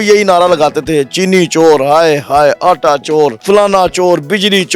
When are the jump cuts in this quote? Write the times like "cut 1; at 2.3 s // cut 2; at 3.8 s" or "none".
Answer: cut 1; at 3.4 s